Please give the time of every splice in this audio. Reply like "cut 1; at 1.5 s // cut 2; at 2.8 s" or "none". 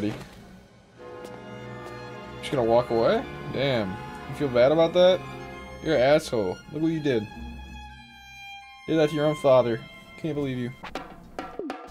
cut 1; at 10.8 s